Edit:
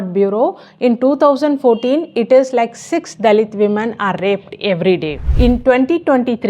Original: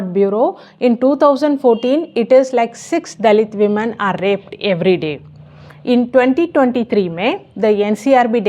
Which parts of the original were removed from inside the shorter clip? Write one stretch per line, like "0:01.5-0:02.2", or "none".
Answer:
0:05.2-0:05.7